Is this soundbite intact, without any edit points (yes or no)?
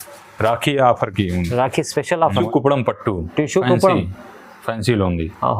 no